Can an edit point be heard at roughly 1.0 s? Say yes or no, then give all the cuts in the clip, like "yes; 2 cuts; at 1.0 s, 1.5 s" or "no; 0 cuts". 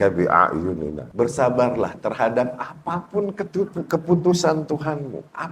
yes; 1 cut; at 1.0 s